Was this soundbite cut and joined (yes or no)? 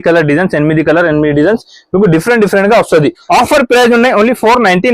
yes